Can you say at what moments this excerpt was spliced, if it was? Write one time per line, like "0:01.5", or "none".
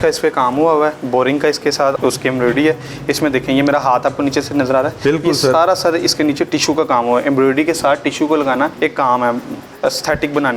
0:02.0
0:08.7
0:09.6